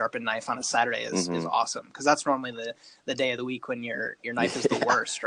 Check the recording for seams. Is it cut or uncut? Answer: uncut